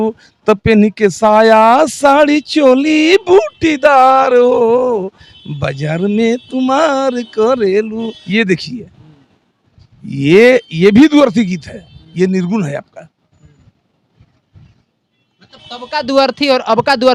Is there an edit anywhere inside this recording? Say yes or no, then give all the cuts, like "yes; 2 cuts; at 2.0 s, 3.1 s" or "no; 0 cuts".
no; 0 cuts